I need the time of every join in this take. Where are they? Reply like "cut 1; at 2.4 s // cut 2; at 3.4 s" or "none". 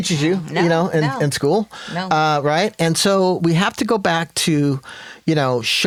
none